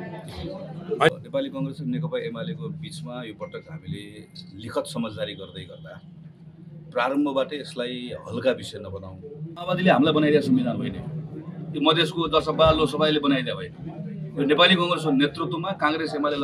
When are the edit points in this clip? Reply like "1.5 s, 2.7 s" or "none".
1.2 s, 9.6 s